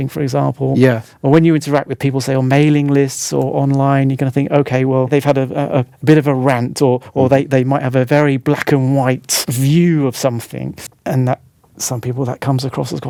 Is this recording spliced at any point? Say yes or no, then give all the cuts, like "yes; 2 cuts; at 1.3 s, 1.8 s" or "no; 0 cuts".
no; 0 cuts